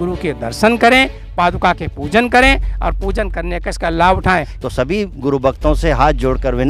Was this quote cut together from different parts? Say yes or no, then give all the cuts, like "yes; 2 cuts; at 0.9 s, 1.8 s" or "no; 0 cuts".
yes; 1 cut; at 4.6 s